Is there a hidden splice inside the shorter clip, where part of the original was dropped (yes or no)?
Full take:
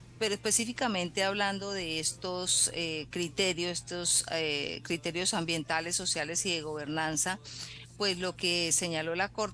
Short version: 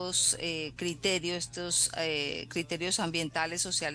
no